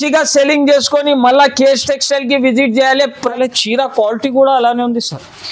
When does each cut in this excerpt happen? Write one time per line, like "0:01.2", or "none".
0:03.3